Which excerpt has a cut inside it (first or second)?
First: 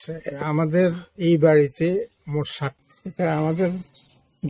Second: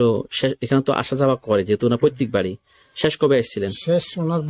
first